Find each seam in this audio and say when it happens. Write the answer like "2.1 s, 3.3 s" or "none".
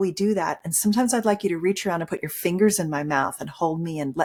none

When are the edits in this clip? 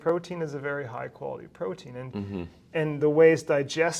none

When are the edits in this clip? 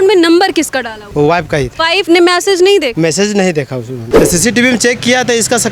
1.0 s, 1.9 s, 2.9 s, 4.0 s

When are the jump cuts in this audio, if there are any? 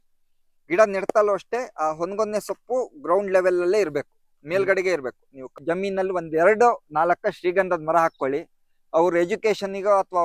5.5 s

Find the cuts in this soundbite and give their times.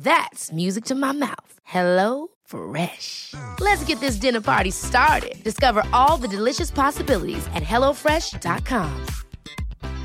none

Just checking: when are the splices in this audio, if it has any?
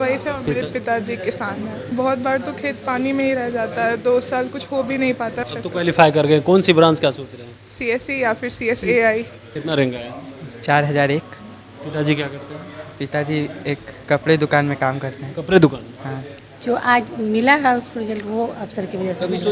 1.9 s, 5.4 s, 9.4 s, 16.3 s

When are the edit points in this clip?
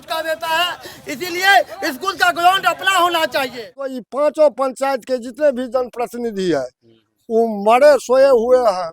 4.0 s

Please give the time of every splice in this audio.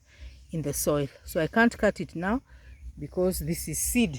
none

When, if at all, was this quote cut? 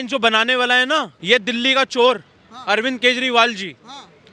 1.1 s

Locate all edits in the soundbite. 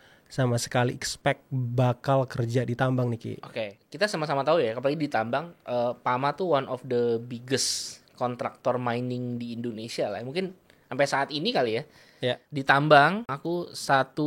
3.8 s, 12.5 s, 13.4 s

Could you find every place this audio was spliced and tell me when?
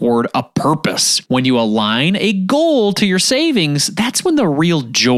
1.1 s

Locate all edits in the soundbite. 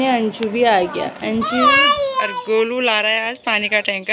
2.2 s

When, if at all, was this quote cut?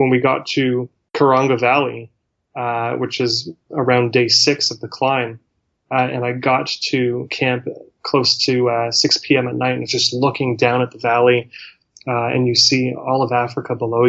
1.0 s

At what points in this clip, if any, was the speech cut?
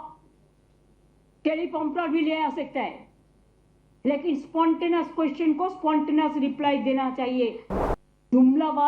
7.7 s

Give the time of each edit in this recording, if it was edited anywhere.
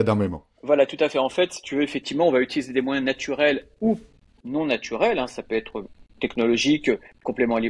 none

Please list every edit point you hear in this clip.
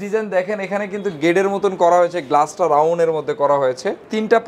none

